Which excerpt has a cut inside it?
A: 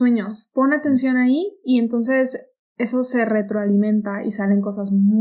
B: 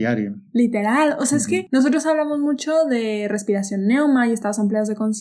B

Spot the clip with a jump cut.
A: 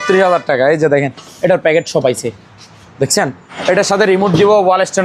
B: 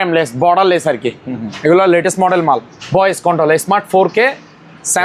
A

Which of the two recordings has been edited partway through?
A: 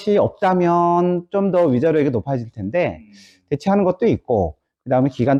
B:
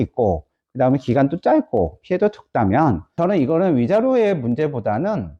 B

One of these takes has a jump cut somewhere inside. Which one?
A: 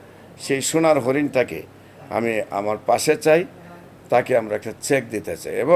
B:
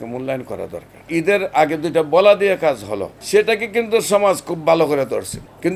B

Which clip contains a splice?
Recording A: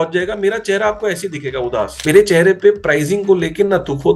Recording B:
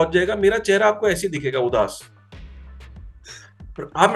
A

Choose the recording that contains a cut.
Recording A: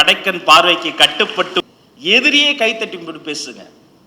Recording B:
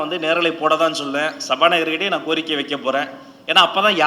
A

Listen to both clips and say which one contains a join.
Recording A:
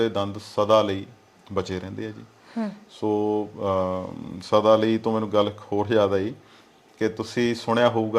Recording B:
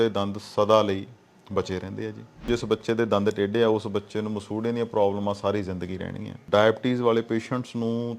B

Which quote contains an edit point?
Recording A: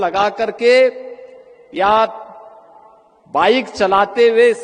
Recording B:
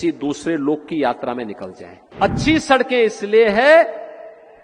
B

